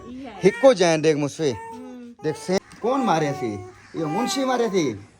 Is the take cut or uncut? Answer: cut